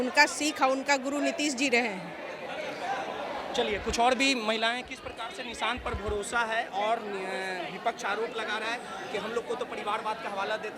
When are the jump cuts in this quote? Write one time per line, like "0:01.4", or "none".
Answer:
none